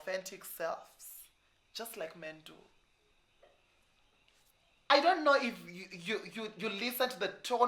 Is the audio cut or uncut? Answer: cut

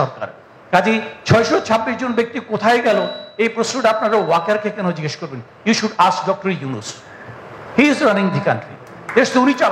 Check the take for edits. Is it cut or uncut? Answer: uncut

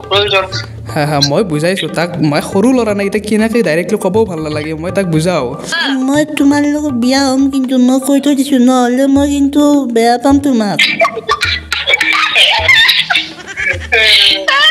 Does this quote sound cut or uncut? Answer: cut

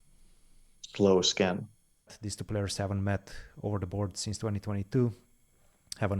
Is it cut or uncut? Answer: cut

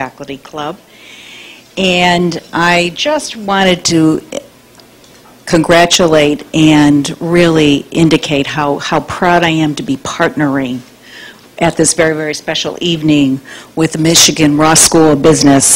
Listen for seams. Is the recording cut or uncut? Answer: uncut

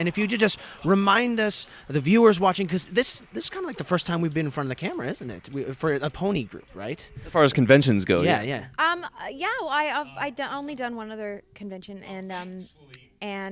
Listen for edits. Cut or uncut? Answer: cut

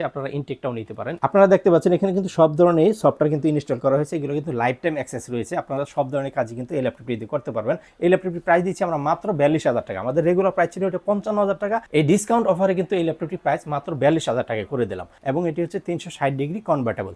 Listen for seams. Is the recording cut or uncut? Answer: cut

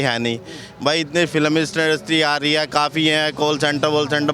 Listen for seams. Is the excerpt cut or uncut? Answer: uncut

